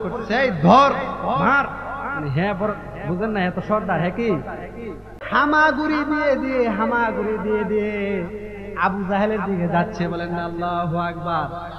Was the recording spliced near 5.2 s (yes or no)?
yes